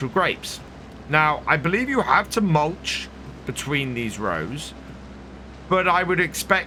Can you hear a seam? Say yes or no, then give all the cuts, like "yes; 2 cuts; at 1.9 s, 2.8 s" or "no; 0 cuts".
no; 0 cuts